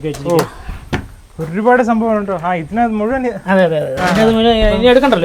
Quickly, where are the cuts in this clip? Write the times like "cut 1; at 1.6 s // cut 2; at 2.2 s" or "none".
none